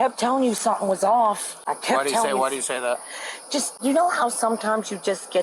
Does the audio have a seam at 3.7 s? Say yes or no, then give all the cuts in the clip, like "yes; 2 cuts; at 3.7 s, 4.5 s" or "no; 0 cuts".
yes; 2 cuts; at 1.5 s, 3.7 s